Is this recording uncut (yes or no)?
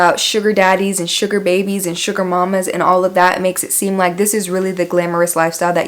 yes